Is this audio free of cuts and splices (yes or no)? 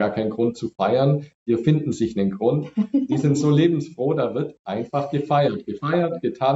yes